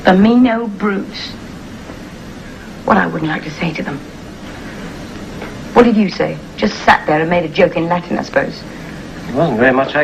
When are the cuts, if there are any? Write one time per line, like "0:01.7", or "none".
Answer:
none